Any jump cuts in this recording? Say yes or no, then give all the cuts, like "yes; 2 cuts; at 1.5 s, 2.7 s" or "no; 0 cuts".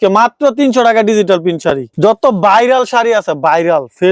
no; 0 cuts